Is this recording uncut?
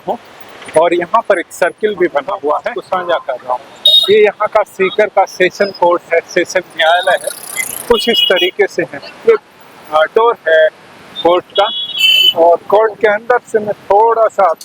no; 1 cut; at 2.7 s

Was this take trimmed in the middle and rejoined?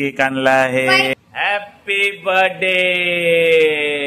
yes; 1 cut; at 1.1 s

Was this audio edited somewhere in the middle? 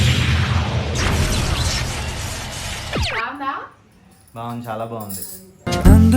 yes; 1 cut; at 3.2 s

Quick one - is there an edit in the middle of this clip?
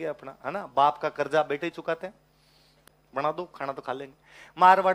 yes; 1 cut; at 2.8 s

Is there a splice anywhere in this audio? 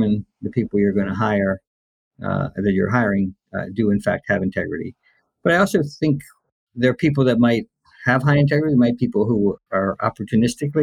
yes; 1 cut; at 9.6 s

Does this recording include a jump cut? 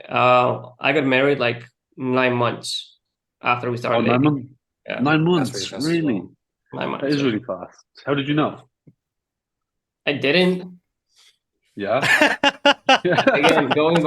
no; 0 cuts

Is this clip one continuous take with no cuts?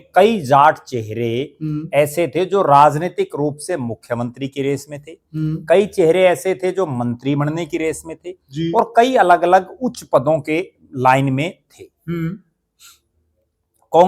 yes; 0 cuts

